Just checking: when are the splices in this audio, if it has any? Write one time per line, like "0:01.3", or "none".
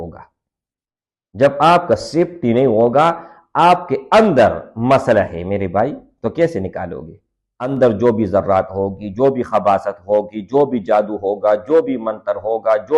0:07.7